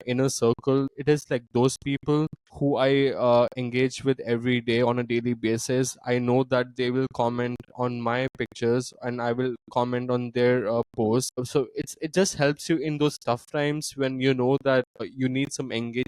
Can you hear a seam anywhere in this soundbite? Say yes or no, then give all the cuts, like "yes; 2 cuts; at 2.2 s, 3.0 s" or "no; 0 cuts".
yes; 4 cuts; at 0.9 s, 2.4 s, 11.5 s, 15.1 s